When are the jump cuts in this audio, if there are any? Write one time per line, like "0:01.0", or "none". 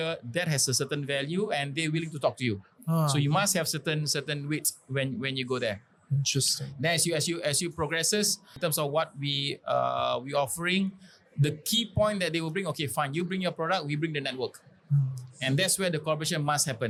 none